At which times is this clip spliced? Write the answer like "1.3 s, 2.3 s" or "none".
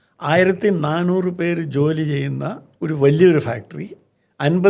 2.7 s